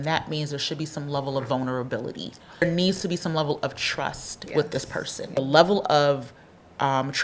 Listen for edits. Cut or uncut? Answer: cut